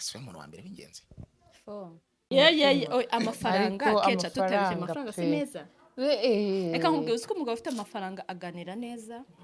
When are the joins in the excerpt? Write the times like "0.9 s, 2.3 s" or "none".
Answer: 2.2 s